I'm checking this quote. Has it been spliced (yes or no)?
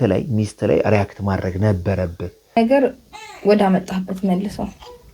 yes